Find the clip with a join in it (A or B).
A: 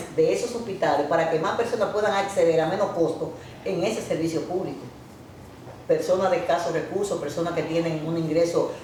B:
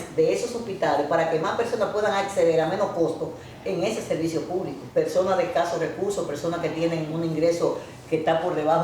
B